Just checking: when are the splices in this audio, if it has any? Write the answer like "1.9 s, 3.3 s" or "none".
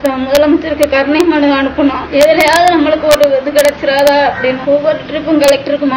2.0 s, 4.6 s